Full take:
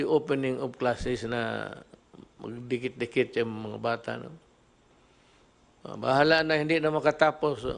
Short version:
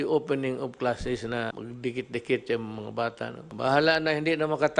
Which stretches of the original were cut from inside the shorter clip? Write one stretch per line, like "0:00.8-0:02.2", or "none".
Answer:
0:01.5-0:02.4
0:04.3-0:05.9